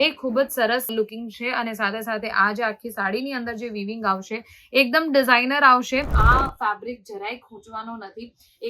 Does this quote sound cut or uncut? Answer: cut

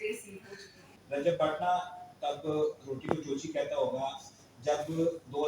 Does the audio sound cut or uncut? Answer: cut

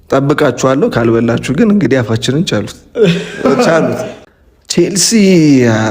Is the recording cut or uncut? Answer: cut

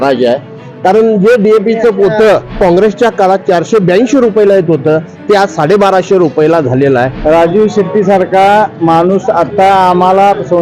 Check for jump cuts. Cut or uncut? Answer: cut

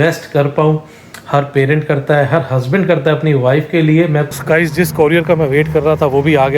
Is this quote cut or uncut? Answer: cut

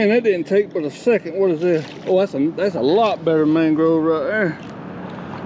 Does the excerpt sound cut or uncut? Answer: uncut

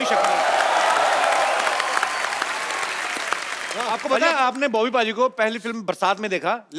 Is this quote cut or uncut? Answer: cut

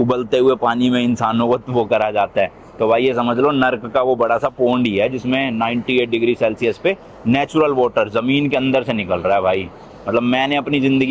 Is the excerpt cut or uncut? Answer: uncut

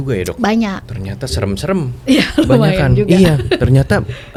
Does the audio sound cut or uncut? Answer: uncut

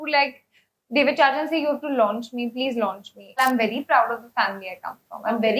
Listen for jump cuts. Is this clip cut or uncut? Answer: cut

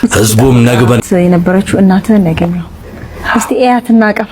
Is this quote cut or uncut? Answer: cut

